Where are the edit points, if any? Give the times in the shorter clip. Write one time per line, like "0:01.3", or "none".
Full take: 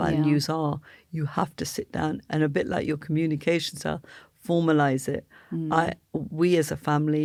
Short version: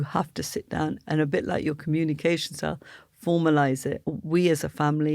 0:04.1